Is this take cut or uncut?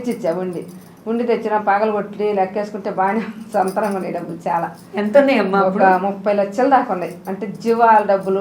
uncut